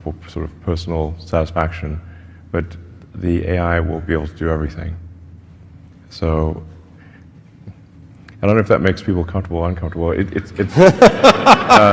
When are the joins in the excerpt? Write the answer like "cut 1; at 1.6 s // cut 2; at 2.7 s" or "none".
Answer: none